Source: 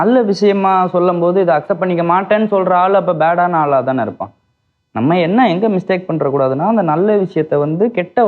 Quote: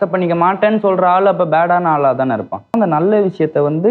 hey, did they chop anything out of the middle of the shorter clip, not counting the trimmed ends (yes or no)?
yes